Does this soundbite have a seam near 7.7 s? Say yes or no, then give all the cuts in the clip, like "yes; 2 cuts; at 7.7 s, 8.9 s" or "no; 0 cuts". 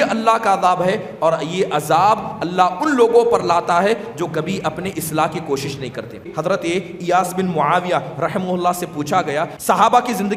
no; 2 cuts; at 6.3 s, 9.5 s